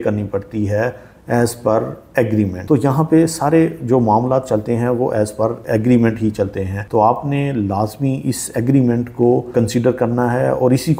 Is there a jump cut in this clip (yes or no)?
no